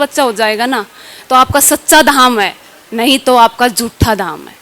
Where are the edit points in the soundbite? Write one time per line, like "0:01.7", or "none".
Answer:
none